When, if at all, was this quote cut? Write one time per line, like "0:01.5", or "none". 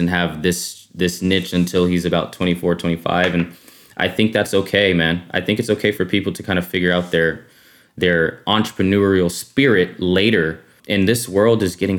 0:10.8

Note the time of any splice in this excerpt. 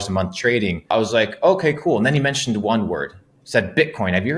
0:00.9

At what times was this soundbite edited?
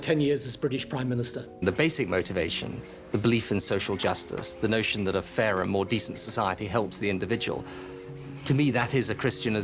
0:01.4

